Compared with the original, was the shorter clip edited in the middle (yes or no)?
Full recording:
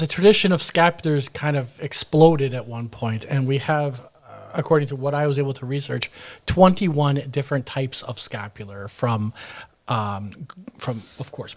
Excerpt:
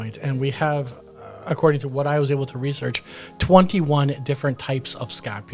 no